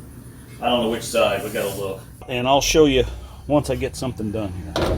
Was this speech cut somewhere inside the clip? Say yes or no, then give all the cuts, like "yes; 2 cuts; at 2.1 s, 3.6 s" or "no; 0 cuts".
yes; 1 cut; at 2.3 s